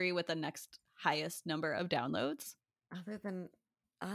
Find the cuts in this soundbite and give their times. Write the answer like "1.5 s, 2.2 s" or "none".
none